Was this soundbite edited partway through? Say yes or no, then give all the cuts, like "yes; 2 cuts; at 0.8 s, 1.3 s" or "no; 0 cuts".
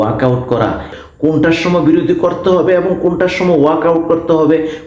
yes; 1 cut; at 0.9 s